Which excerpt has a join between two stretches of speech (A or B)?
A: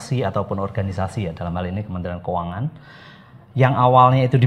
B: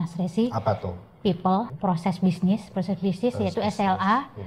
B